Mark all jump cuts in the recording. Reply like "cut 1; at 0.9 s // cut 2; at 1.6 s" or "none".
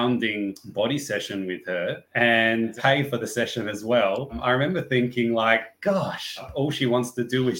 cut 1; at 2.7 s // cut 2; at 4.4 s // cut 3; at 6.5 s